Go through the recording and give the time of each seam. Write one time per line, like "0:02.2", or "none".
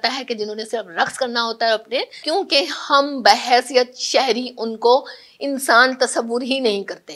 0:02.2